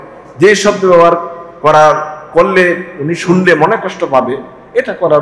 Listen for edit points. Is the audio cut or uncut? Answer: uncut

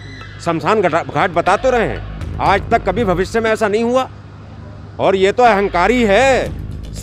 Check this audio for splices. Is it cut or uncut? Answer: uncut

